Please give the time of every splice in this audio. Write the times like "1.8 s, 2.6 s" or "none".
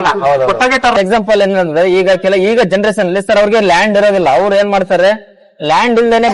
0.9 s